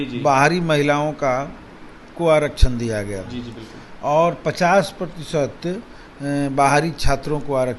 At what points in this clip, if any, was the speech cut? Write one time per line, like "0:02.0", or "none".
none